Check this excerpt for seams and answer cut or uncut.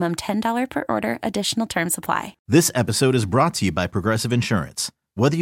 cut